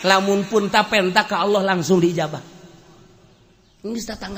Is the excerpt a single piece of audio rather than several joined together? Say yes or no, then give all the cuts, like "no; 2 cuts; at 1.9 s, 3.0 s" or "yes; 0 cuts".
yes; 0 cuts